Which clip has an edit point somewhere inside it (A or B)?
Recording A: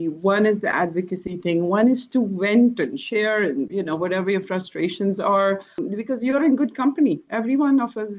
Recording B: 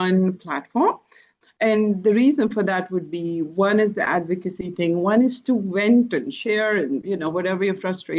B